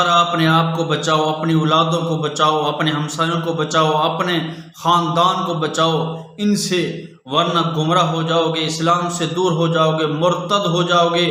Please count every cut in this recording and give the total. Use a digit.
0